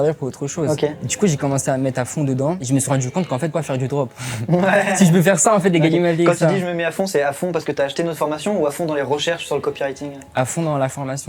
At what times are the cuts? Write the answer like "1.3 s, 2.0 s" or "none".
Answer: none